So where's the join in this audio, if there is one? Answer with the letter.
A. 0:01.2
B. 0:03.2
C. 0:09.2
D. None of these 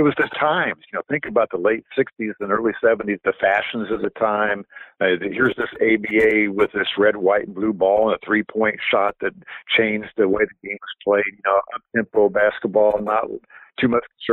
B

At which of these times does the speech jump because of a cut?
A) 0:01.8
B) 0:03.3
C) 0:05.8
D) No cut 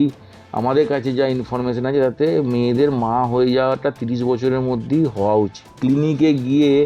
C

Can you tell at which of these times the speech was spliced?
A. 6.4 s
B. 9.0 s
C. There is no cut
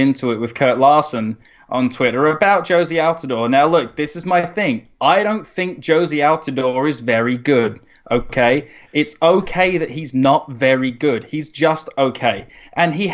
B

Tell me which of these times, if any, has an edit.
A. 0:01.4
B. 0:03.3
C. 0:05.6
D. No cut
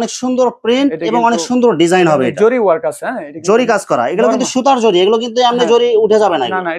D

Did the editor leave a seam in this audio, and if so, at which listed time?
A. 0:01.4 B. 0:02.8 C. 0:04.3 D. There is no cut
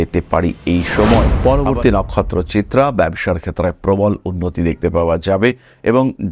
A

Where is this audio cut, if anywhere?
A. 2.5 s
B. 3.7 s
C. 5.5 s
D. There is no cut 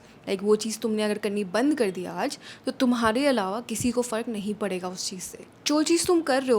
C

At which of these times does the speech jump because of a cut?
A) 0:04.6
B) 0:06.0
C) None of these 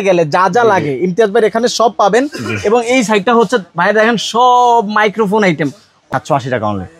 B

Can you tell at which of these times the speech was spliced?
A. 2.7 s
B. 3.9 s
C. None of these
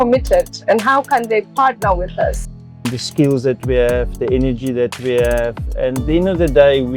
A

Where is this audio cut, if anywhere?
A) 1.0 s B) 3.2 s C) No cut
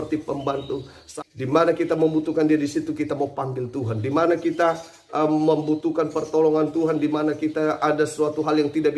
A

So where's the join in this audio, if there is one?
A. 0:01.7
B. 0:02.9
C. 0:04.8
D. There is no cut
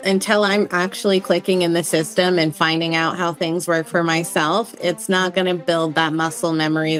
D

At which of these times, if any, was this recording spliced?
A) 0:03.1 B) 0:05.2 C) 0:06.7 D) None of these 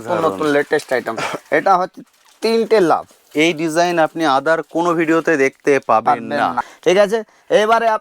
C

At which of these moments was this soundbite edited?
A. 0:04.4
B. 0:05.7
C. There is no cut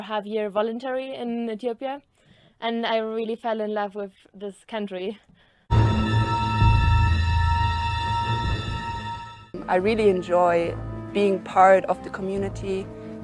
B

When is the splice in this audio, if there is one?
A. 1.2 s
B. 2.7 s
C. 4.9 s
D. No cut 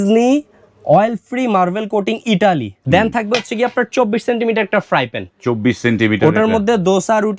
B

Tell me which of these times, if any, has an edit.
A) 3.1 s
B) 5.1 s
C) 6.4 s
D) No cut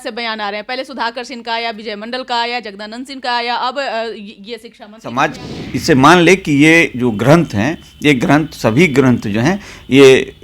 B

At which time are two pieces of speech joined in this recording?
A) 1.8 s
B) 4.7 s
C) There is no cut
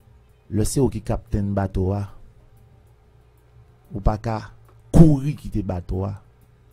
C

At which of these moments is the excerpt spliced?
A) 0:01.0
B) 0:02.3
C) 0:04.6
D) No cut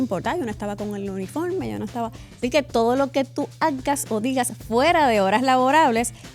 B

